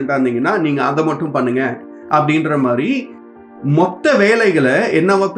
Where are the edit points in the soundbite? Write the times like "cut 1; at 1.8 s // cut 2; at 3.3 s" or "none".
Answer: cut 1; at 3.1 s